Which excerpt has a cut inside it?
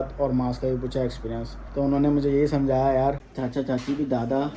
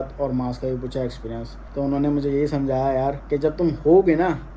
first; 1 cut; at 3.2 s

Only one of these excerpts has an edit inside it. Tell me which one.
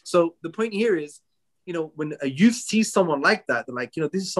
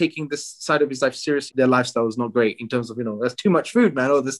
second; 1 cut; at 1.5 s

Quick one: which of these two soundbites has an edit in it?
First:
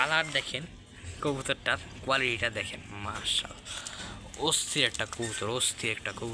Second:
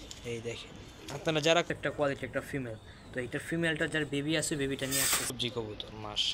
second; 2 cuts; at 1.7 s, 5.4 s

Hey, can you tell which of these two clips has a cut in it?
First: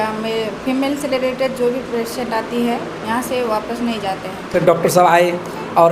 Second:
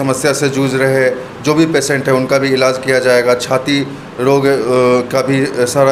first; 1 cut; at 4.6 s

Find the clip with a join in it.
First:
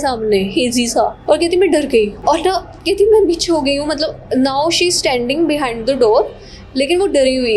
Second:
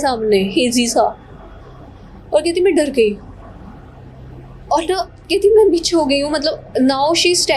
first; 2 cuts; at 1.2 s, 2.2 s

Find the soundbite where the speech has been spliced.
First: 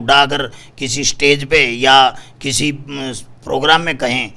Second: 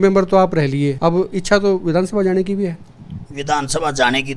second; 1 cut; at 0.9 s

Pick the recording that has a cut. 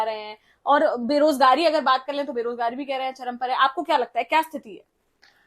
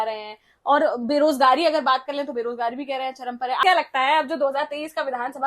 second; 1 cut; at 3.6 s

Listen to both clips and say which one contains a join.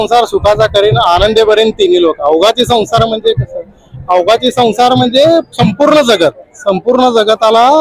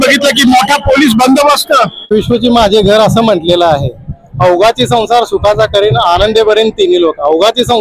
second; 1 cut; at 2.1 s

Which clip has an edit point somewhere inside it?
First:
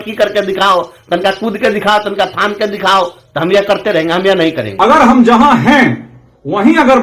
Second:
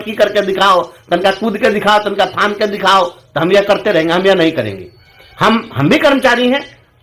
first; 1 cut; at 4.6 s

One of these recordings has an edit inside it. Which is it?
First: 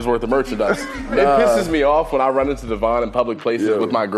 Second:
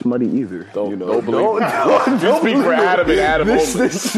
first; 1 cut; at 1.1 s

